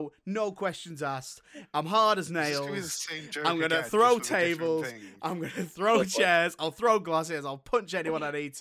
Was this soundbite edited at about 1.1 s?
no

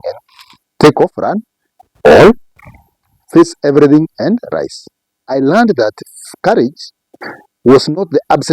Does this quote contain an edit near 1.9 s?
no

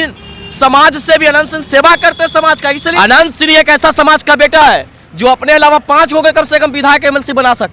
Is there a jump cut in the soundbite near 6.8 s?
no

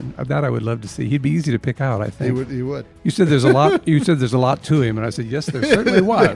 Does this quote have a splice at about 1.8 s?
no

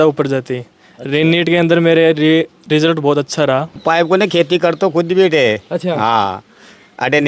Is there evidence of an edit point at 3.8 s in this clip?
yes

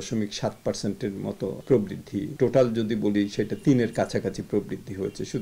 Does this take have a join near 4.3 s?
no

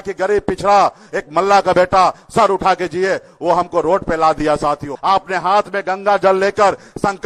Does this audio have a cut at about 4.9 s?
yes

